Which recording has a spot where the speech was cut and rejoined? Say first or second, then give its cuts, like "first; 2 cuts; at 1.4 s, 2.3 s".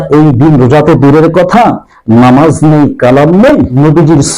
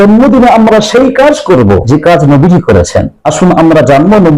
second; 2 cuts; at 1.8 s, 3.2 s